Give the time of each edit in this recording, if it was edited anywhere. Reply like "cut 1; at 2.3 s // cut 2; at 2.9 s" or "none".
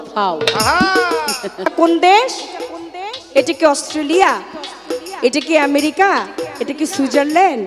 cut 1; at 1.7 s